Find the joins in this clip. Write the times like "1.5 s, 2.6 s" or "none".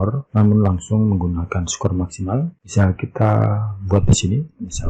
2.6 s